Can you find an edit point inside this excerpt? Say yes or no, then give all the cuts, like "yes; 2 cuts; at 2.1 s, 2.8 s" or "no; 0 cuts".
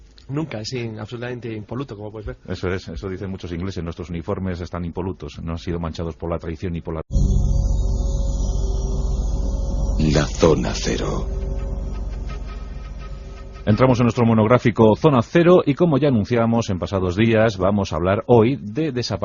no; 0 cuts